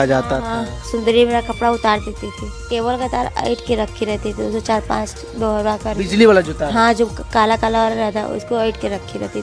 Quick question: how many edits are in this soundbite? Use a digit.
1